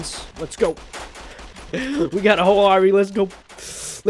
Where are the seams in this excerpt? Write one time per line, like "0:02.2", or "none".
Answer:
none